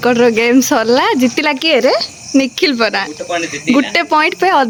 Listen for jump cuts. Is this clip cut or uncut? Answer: uncut